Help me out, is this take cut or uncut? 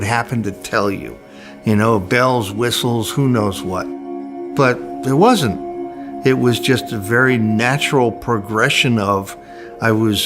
cut